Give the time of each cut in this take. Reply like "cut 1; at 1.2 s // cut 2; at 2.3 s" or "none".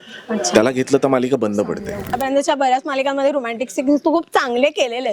cut 1; at 2.1 s